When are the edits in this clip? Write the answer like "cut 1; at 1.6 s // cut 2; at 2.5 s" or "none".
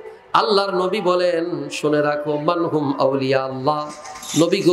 none